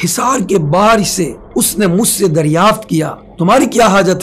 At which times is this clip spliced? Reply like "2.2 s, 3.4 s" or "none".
1.4 s, 3.2 s